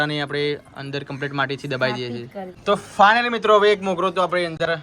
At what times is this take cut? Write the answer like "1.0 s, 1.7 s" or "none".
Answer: 2.5 s